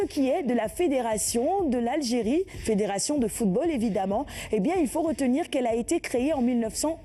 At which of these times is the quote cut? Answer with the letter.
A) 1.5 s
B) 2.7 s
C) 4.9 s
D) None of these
D